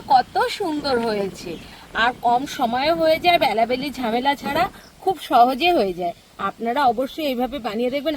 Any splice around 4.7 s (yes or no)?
no